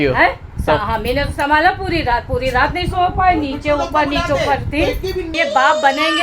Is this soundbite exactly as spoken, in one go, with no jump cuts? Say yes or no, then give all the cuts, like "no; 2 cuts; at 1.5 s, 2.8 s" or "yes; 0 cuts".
no; 1 cut; at 5.3 s